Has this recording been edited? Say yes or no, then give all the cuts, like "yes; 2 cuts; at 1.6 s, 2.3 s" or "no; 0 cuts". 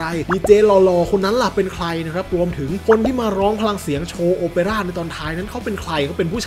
no; 0 cuts